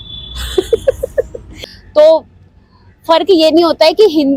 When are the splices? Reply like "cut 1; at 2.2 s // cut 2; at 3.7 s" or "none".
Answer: cut 1; at 1.4 s